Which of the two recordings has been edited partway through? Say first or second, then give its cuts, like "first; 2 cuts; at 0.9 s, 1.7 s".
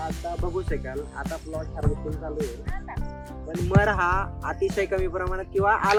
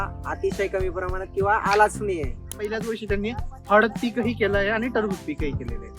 second; 1 cut; at 2.7 s